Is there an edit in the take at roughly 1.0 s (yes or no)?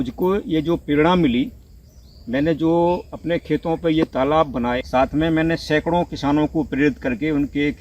no